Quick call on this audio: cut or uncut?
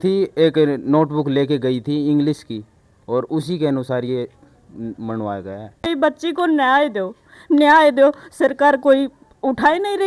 cut